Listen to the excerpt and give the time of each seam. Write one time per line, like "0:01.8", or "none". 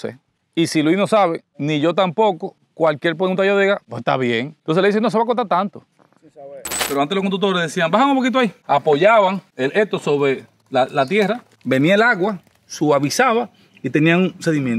0:01.5
0:04.5
0:06.8